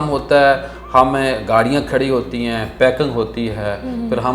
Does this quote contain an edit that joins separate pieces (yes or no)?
no